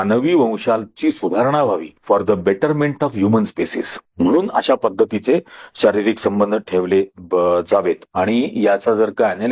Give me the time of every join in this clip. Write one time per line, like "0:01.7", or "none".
0:08.0